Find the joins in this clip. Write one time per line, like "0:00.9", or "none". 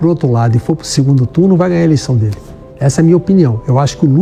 none

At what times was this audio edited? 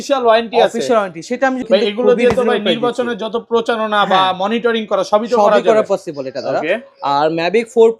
0:01.7

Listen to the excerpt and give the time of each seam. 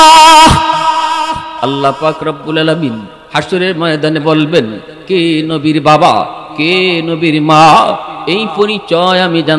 0:01.4

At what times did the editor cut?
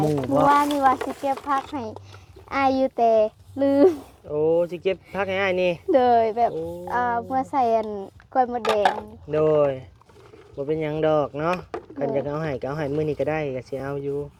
none

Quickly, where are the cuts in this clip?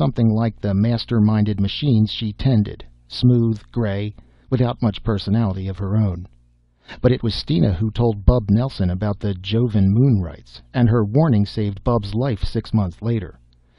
none

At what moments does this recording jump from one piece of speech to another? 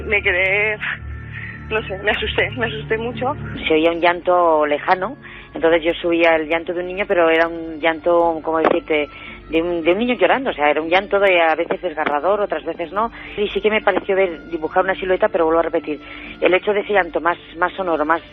0:03.5
0:13.2

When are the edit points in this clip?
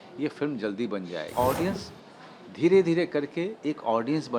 0:01.3

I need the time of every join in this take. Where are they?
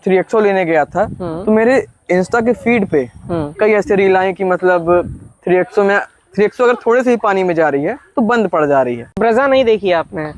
0:09.2

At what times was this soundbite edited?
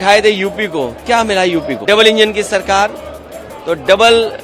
0:01.8

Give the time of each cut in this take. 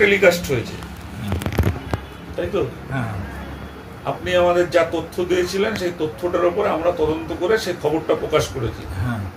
none

